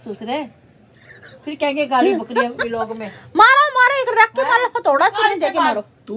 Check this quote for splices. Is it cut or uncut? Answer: uncut